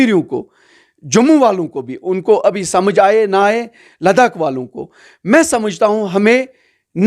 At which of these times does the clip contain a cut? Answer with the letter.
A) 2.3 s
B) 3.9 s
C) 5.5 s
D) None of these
D